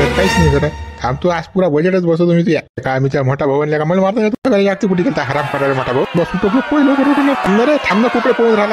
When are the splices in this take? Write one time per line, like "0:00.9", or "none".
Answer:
none